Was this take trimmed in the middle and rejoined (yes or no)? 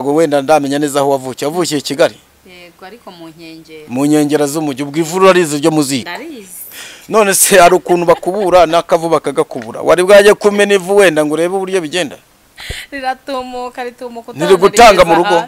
no